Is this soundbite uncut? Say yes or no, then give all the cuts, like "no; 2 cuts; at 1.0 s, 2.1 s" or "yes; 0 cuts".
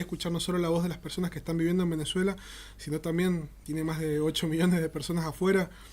no; 1 cut; at 3.5 s